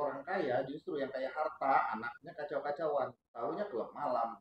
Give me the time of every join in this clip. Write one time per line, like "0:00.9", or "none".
0:03.2

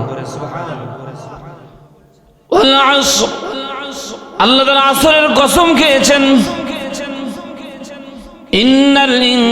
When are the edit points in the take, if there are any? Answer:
0:01.7

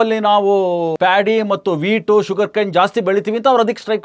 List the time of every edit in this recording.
0:00.9

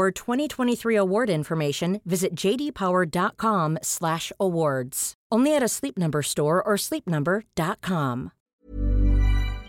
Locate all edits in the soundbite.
0:08.4

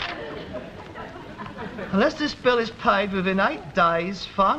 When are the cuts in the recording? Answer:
0:02.8

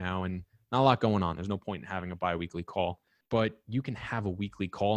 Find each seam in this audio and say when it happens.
0:03.1

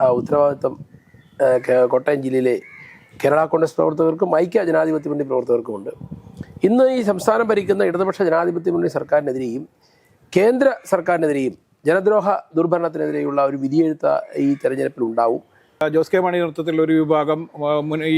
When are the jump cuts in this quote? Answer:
0:15.8

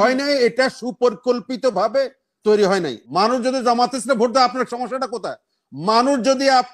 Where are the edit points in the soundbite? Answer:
0:03.0

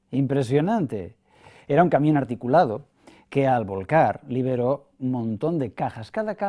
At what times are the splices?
0:03.3

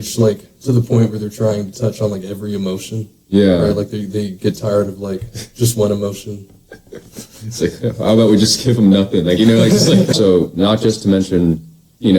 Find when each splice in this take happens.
0:10.1

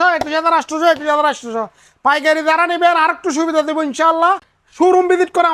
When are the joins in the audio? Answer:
0:04.6

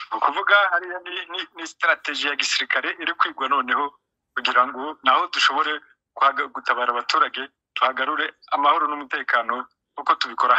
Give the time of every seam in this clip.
none

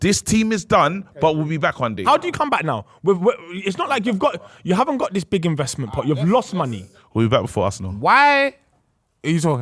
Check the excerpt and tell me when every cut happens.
0:02.0

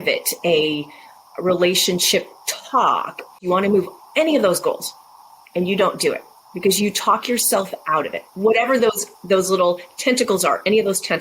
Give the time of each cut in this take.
0:03.4

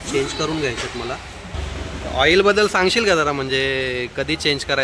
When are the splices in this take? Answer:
0:01.6

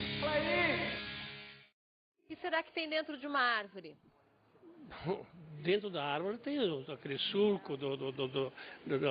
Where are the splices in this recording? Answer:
0:01.5

